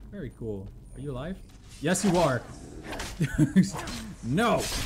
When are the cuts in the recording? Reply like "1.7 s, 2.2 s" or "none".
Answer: none